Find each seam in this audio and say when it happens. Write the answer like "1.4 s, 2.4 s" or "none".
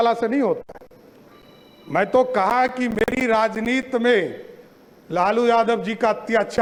none